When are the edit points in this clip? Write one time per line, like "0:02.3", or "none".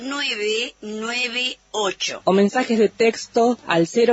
none